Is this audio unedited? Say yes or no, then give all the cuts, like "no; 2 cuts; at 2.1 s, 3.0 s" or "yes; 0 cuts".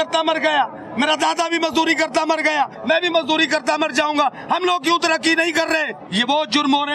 no; 2 cuts; at 2.8 s, 6.0 s